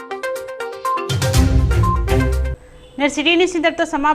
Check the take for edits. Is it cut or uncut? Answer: uncut